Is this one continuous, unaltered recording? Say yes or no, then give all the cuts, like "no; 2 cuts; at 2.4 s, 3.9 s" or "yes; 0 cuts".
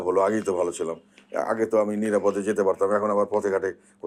yes; 0 cuts